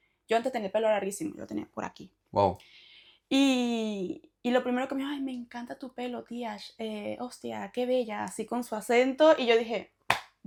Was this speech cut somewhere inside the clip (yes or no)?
no